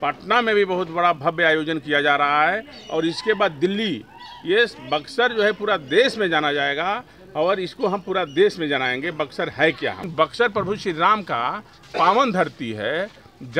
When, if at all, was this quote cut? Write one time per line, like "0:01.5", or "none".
0:10.1